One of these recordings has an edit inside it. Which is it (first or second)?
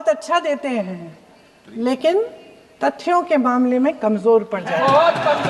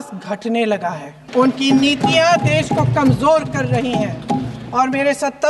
second